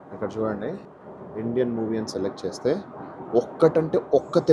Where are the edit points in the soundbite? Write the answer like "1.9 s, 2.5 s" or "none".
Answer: 1.0 s